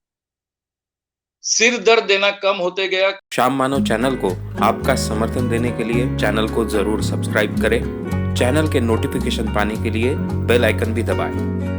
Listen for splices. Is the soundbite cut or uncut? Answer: cut